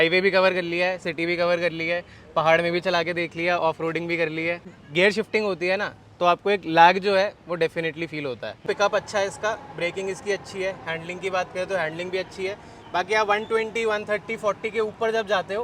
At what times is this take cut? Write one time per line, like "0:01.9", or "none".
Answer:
0:04.8
0:08.6